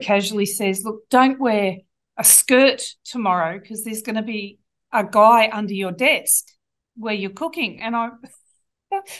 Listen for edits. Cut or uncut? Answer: uncut